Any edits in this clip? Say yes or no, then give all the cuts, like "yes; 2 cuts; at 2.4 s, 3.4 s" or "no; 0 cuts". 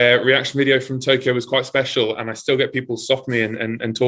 no; 0 cuts